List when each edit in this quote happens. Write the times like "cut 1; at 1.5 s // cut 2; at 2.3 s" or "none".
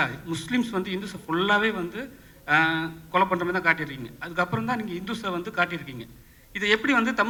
none